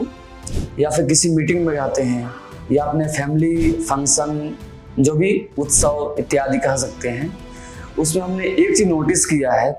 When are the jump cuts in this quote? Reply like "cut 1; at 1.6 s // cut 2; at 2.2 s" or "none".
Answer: none